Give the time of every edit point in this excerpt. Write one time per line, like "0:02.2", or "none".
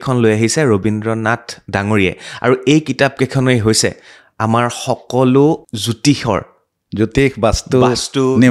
0:05.7